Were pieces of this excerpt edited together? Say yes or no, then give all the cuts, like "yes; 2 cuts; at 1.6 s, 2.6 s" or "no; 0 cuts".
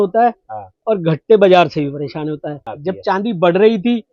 yes; 1 cut; at 2.7 s